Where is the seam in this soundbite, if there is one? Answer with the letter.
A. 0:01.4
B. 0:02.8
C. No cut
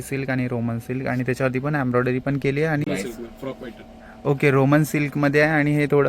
B